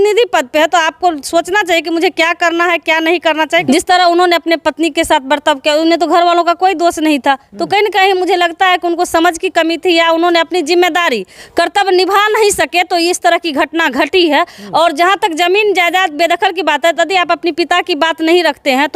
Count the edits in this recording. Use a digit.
2